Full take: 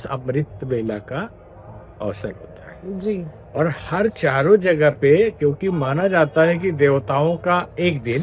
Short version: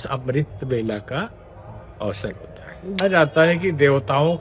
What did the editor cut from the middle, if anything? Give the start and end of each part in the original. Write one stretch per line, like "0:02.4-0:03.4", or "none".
0:03.0-0:06.0